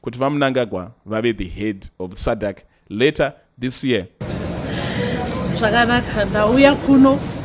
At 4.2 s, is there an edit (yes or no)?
yes